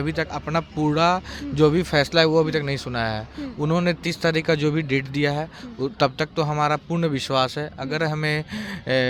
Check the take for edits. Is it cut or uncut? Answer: uncut